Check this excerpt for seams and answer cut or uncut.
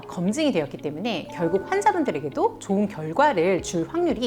uncut